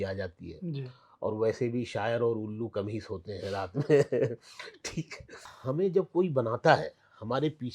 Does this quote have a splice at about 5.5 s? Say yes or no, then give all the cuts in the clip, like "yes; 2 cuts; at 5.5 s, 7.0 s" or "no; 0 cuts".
yes; 1 cut; at 5.5 s